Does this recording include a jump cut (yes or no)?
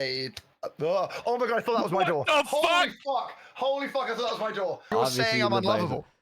yes